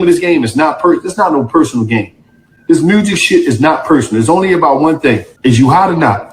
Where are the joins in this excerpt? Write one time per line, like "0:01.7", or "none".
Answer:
0:05.3